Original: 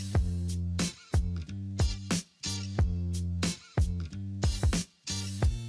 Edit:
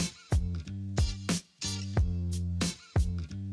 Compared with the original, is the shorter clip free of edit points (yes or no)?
yes